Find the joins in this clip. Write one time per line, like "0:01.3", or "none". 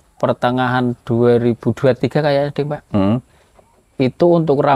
none